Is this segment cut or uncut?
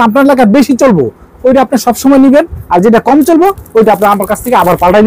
uncut